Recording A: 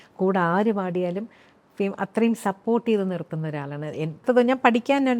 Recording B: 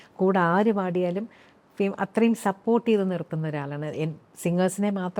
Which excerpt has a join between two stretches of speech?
A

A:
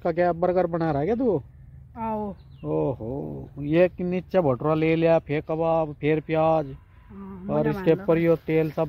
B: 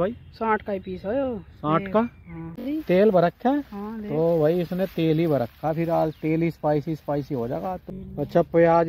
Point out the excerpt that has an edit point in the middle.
B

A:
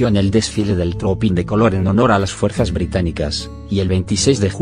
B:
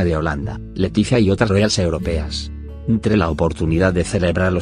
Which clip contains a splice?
A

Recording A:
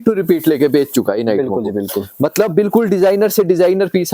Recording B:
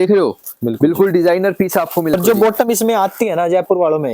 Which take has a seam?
B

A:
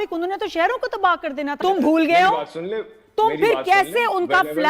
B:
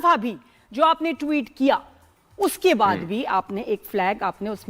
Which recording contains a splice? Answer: A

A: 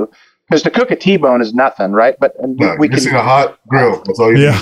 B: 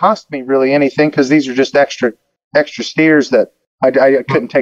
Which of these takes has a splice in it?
B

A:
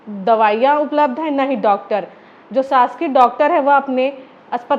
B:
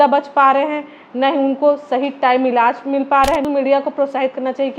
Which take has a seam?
B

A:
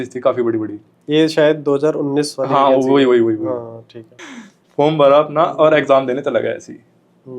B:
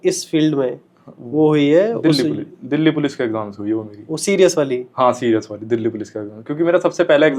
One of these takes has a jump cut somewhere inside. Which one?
A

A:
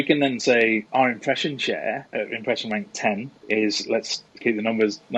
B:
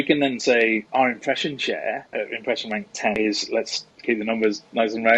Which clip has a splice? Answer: B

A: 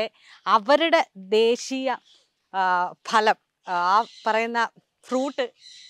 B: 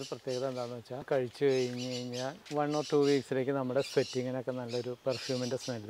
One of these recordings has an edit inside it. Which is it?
B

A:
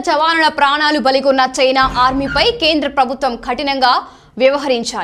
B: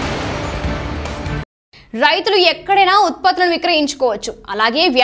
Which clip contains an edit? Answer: B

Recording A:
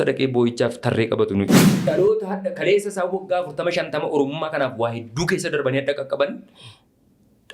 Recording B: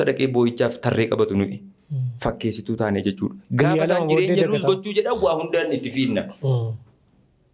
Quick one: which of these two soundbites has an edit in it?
A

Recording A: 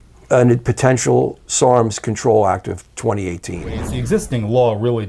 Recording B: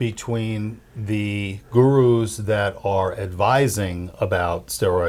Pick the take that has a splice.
A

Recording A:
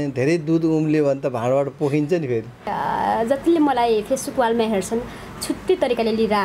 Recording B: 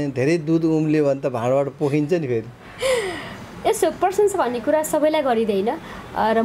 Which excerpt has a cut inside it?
A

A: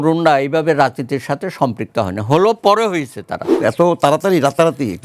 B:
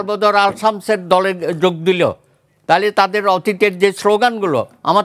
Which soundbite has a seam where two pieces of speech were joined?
A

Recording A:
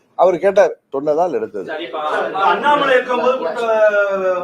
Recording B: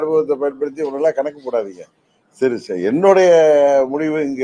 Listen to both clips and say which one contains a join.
A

